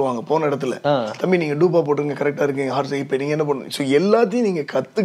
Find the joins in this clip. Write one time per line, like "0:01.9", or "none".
none